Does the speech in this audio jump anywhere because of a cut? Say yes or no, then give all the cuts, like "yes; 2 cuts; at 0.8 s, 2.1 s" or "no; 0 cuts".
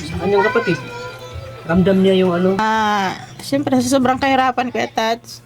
yes; 1 cut; at 2.6 s